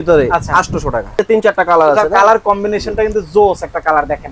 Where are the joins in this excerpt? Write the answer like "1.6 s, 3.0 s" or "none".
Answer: 1.2 s